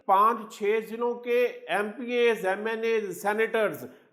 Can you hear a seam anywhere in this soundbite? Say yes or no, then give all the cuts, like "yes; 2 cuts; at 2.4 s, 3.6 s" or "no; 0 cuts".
no; 0 cuts